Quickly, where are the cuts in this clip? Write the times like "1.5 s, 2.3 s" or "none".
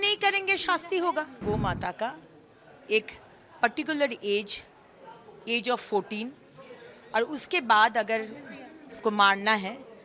1.4 s